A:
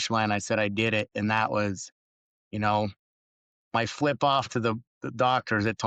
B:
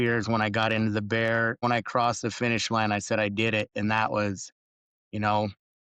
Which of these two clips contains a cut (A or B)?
B